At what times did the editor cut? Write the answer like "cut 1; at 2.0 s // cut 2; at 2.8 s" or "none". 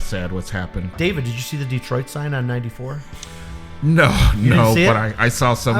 cut 1; at 0.9 s